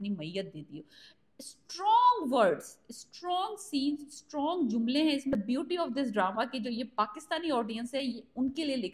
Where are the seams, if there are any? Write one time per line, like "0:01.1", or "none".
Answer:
0:05.3